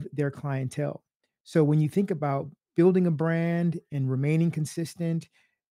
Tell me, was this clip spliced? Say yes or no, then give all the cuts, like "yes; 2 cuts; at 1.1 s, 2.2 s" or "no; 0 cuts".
yes; 1 cut; at 2.5 s